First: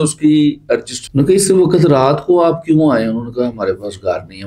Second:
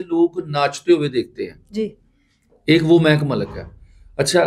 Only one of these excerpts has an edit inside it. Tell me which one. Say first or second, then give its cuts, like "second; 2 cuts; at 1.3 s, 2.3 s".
first; 1 cut; at 1.0 s